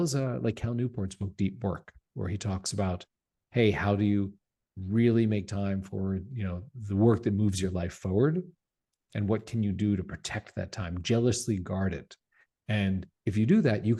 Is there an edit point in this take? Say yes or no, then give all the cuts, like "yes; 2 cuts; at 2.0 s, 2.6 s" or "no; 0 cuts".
no; 0 cuts